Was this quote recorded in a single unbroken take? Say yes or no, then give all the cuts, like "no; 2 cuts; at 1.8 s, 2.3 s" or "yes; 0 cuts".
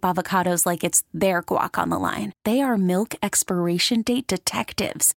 yes; 0 cuts